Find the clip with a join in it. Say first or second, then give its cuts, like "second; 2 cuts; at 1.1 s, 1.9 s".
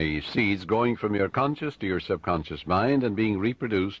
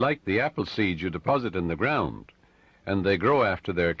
first; 1 cut; at 2.0 s